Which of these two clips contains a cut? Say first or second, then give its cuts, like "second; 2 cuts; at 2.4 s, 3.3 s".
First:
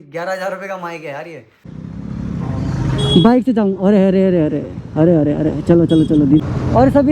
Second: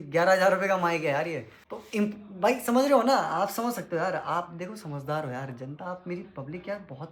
first; 2 cuts; at 1.7 s, 6.4 s